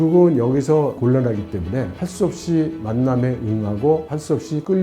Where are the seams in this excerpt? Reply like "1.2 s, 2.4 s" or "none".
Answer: 1.0 s

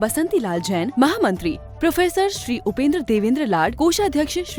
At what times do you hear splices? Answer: none

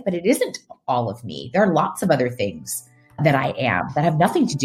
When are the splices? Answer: 3.2 s

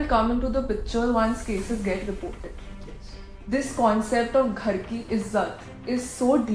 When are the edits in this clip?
none

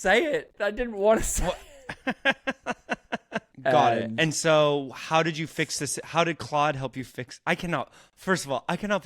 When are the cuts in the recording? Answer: 3.4 s

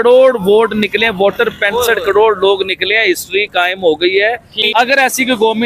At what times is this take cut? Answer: 4.5 s

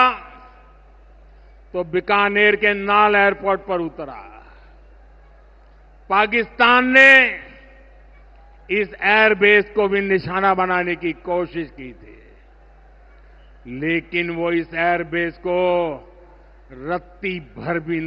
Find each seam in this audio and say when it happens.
none

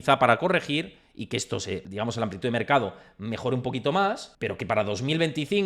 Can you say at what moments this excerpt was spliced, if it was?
1.9 s, 4.3 s

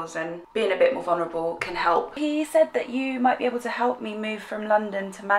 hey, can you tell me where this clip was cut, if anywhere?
2.2 s

